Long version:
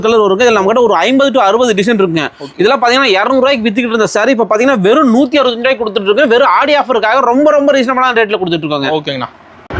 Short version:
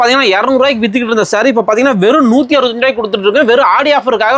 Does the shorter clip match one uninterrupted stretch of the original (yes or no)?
yes